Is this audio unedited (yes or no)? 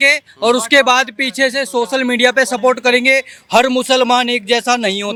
yes